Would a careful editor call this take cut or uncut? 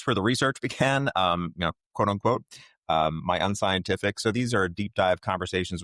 uncut